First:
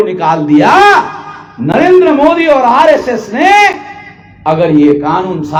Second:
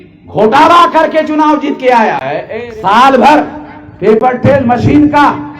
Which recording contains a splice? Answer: second; 1 cut; at 2.5 s

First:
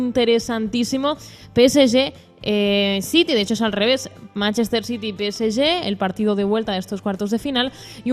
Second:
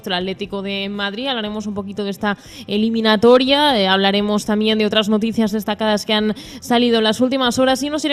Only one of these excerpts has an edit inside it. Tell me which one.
first; 1 cut; at 1.2 s

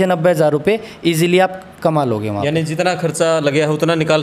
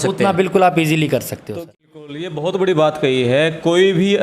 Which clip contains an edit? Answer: second; 1 cut; at 1.4 s

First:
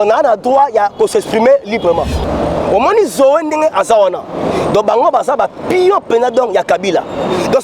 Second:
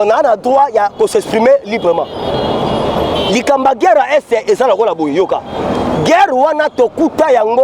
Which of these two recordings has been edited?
first; 1 cut; at 2.2 s

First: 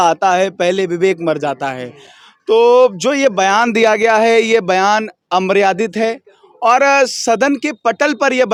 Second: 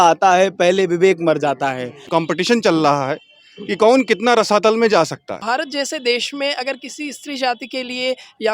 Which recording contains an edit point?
second; 2 cuts; at 2.0 s, 5.3 s

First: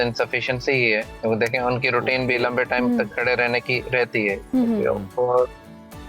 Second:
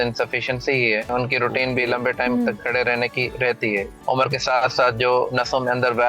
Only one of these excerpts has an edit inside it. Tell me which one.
second; 2 cuts; at 1.1 s, 3.9 s

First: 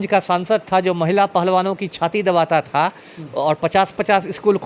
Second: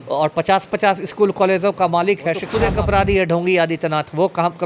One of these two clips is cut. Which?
second; 1 cut; at 2.5 s

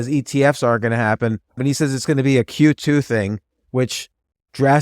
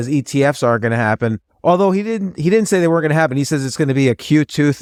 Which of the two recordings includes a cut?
first; 1 cut; at 1.6 s

